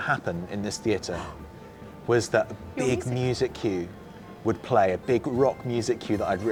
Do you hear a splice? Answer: no; 0 cuts

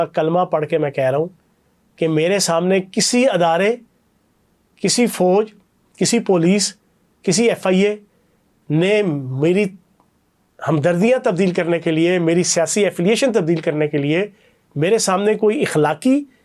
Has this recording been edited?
no; 0 cuts

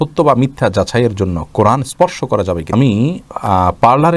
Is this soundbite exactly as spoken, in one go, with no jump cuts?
no; 1 cut; at 2.7 s

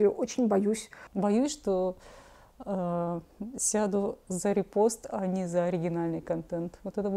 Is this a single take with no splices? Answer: no; 1 cut; at 0.9 s

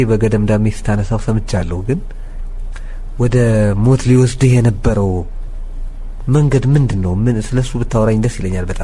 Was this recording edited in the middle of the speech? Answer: no; 0 cuts

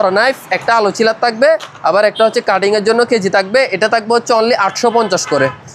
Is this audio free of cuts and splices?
yes; 0 cuts

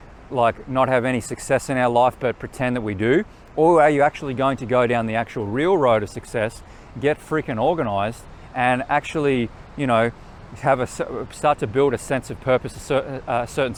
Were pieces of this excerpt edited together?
no; 0 cuts

